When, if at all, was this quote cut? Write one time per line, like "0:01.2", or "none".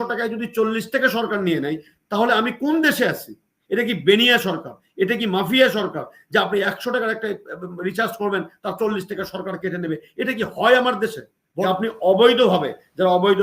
0:11.5